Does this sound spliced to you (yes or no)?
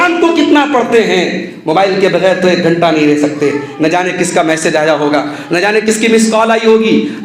no